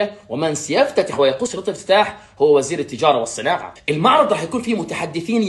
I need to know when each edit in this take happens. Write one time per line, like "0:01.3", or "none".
0:01.4